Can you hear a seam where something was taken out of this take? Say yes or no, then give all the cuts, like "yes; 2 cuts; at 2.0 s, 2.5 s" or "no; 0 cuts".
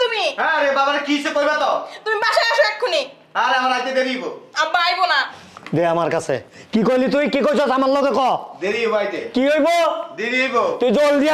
no; 0 cuts